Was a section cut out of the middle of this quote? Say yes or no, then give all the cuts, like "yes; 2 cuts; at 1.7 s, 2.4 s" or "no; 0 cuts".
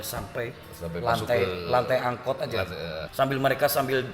yes; 1 cut; at 3.1 s